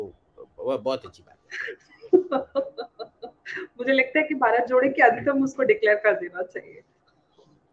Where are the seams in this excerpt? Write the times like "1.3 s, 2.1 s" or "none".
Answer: none